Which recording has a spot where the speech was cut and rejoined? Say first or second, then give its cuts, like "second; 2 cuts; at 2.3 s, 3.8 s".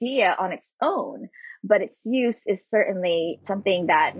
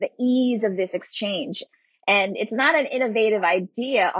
second; 1 cut; at 1.6 s